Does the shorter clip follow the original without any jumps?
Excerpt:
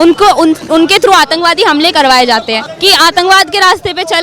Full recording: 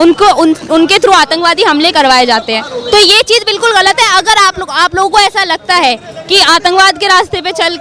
no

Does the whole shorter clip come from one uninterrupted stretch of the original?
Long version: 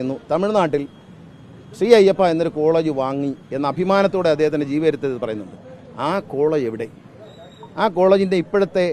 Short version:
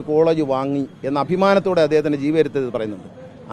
yes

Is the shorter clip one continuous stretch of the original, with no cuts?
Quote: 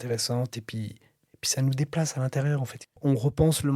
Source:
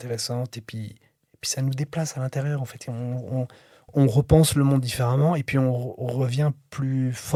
no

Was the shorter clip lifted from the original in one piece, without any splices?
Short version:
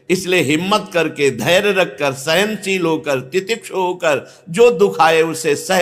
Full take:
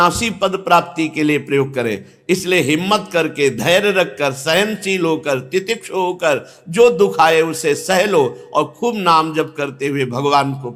yes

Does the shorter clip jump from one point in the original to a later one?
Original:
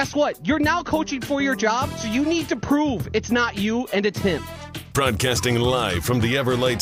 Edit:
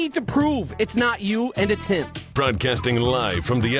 yes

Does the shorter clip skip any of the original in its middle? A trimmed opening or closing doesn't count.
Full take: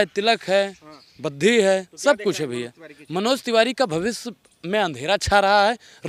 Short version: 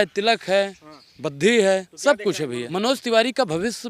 yes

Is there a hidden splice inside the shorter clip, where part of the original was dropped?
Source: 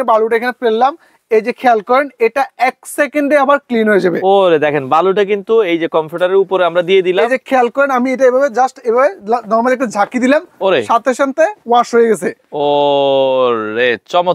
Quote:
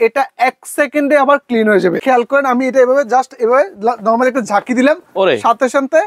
yes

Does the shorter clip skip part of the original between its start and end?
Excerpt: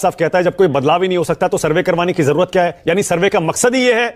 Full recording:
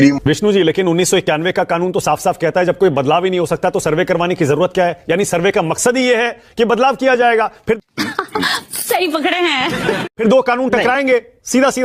no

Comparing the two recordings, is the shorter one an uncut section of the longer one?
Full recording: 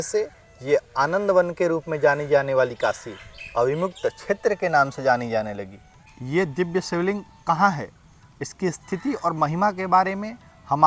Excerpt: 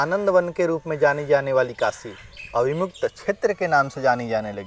yes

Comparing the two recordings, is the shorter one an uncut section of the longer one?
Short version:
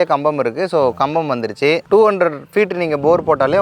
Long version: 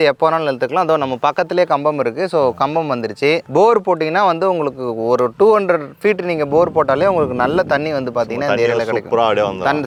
no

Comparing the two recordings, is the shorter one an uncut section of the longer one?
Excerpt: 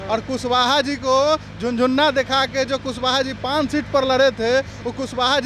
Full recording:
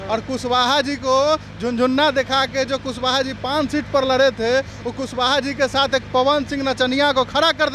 yes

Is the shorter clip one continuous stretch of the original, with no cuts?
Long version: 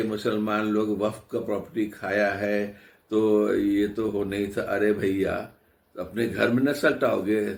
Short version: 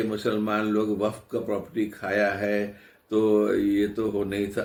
yes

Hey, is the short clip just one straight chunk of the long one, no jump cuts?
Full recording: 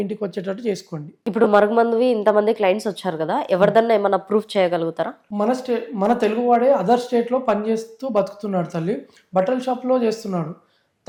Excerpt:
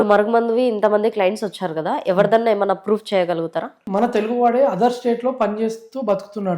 no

